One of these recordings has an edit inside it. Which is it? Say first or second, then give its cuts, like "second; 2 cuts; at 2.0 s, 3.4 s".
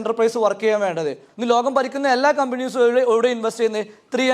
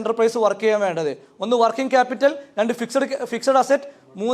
first; 1 cut; at 1.3 s